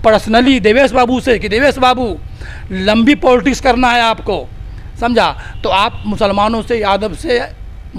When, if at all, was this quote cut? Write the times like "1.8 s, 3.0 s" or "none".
none